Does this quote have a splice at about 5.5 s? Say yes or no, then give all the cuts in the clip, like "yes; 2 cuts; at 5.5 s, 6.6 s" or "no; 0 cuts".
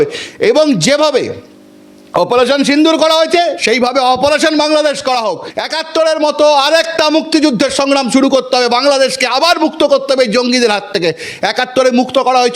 yes; 1 cut; at 5.5 s